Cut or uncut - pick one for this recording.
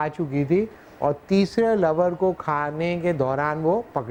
uncut